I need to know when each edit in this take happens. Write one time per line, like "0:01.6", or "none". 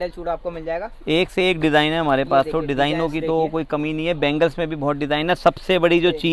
none